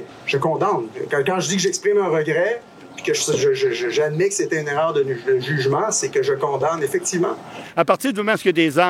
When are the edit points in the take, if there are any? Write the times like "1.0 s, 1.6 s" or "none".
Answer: 7.6 s